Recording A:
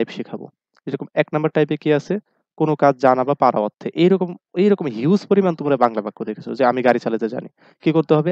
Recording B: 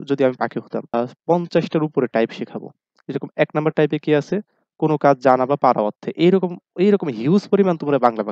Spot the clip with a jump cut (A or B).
B